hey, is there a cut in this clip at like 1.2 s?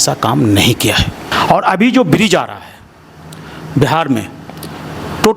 yes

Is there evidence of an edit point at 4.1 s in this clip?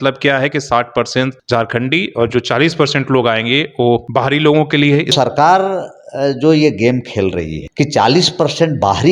yes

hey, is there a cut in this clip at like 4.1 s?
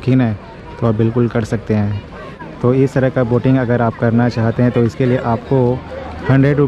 no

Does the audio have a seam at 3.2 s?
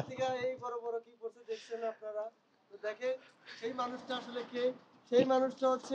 no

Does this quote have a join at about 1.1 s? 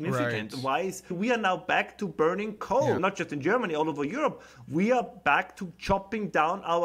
yes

